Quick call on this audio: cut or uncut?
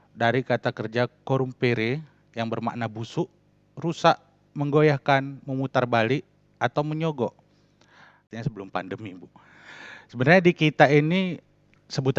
cut